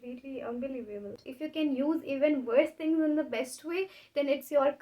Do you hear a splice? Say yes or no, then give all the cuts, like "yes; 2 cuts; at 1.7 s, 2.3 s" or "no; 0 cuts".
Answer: yes; 1 cut; at 1.3 s